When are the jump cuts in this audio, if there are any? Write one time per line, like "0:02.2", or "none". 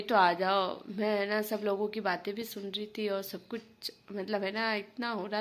none